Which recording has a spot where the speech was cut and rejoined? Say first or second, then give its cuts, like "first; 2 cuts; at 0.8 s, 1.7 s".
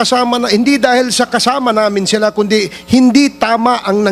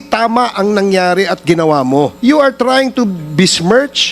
second; 1 cut; at 2.1 s